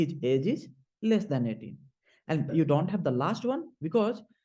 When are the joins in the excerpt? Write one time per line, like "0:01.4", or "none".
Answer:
0:02.5